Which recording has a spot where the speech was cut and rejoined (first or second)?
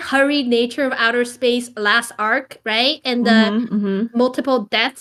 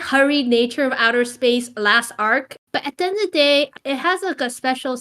second